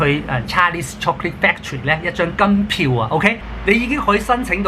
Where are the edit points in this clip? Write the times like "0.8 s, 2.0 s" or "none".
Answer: 3.5 s

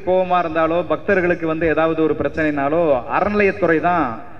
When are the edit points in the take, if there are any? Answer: none

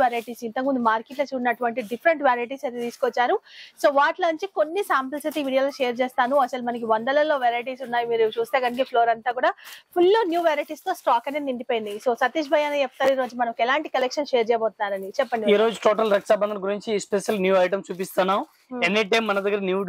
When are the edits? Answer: none

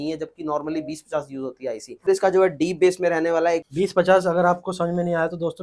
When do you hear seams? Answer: 2.1 s, 3.6 s

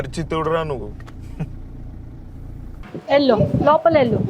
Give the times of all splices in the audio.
2.7 s

